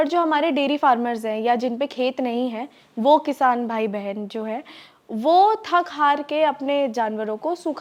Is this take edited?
no; 0 cuts

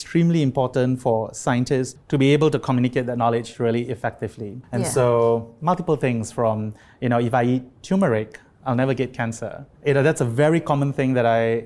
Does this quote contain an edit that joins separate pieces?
yes; 3 cuts; at 2.0 s, 4.6 s, 9.7 s

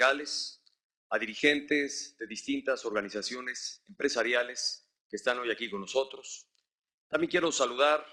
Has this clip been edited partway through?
yes; 1 cut; at 2.0 s

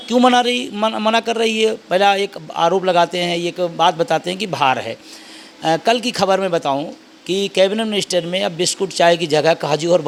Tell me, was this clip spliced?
no; 0 cuts

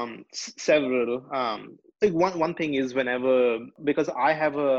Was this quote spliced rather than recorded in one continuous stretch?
yes; 1 cut; at 3.7 s

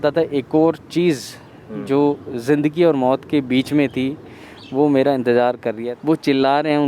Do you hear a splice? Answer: yes; 1 cut; at 5.7 s

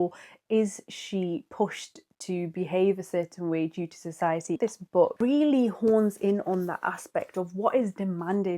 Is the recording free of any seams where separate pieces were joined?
no; 1 cut; at 4.9 s

